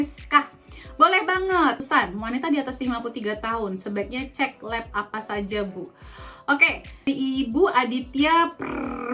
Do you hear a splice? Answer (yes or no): yes